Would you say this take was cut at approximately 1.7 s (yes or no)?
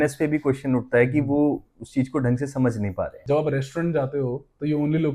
no